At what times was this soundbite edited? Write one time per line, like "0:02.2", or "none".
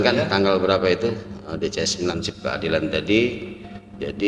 0:02.1